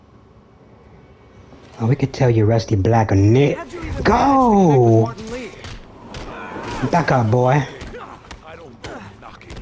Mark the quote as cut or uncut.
uncut